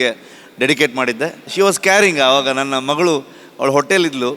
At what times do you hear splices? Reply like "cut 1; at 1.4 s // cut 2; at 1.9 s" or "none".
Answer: cut 1; at 1.4 s